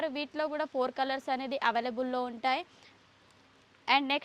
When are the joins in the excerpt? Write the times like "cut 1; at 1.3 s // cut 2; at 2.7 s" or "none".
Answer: cut 1; at 3.0 s